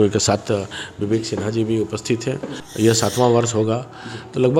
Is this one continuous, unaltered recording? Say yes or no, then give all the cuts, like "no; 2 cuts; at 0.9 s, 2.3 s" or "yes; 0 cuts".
no; 1 cut; at 2.6 s